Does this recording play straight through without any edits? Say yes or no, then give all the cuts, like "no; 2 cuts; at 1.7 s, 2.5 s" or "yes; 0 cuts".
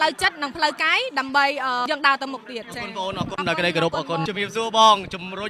no; 1 cut; at 4.2 s